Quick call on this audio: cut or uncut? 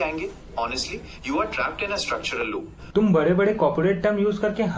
cut